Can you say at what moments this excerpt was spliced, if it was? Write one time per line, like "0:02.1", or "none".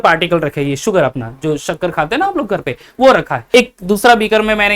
0:03.4

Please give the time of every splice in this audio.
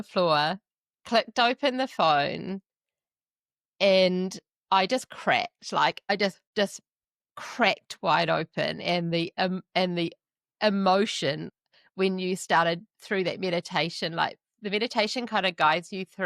0:06.4
0:11.5

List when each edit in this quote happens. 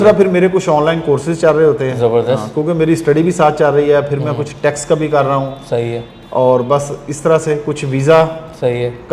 none

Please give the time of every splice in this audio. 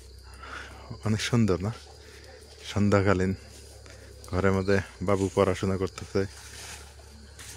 none

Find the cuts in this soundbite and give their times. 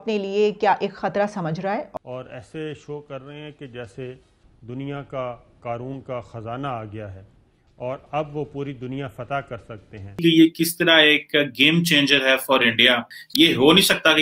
0:01.9
0:10.2
0:13.2

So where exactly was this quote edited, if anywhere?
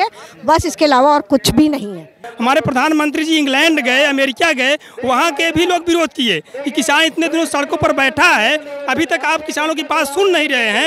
0:02.3

